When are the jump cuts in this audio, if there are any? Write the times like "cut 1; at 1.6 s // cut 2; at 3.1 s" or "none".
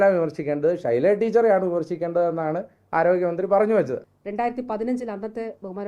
cut 1; at 4.0 s